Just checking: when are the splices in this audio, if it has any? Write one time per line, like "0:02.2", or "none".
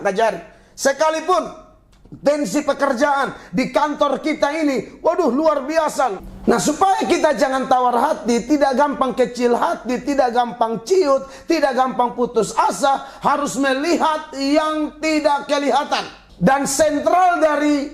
0:06.2
0:16.2